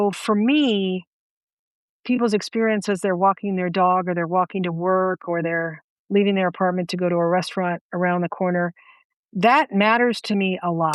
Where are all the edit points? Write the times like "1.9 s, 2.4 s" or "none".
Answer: none